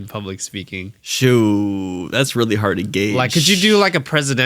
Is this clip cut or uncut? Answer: cut